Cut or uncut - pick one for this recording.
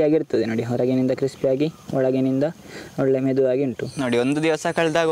cut